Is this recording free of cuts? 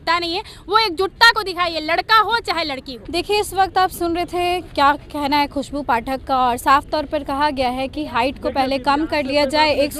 yes; 0 cuts

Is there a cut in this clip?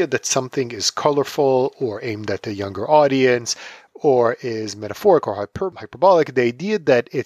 yes; 1 cut; at 5.8 s

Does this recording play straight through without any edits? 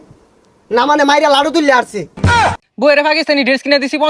no; 1 cut; at 2.3 s

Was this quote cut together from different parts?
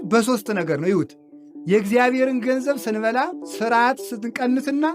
yes; 1 cut; at 3.4 s

